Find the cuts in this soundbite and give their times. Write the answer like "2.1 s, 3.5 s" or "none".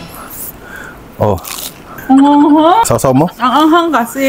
2.8 s